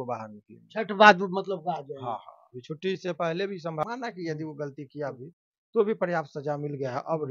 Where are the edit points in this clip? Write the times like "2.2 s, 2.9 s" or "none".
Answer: 3.8 s